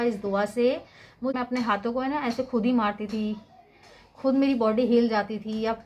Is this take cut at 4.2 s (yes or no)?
no